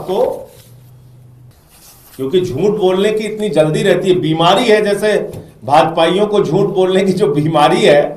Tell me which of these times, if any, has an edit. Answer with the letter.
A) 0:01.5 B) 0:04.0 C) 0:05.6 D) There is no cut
A